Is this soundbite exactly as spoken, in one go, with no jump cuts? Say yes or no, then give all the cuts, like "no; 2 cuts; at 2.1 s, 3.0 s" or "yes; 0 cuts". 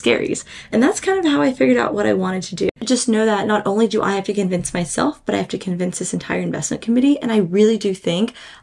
no; 1 cut; at 2.8 s